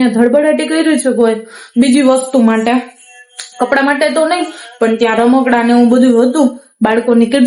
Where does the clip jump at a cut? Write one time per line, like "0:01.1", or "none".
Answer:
none